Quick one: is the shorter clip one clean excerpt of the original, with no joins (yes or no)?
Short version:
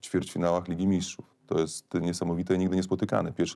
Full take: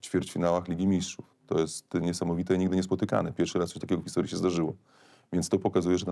yes